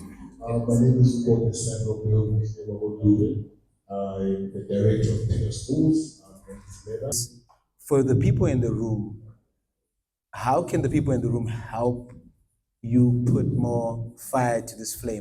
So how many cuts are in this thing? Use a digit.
1